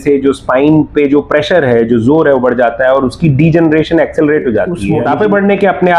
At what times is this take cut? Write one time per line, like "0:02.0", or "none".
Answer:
0:04.8